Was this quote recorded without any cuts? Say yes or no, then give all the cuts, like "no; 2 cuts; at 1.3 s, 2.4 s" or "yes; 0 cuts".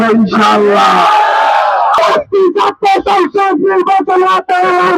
no; 1 cut; at 2.0 s